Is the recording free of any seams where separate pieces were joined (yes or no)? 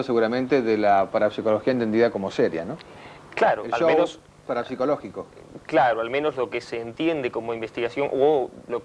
no